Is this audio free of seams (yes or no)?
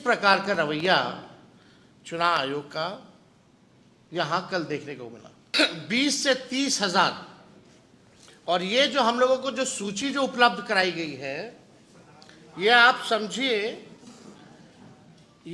no